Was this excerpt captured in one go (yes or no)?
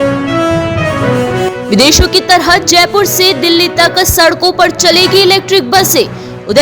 yes